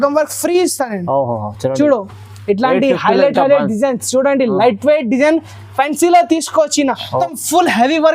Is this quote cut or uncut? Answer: cut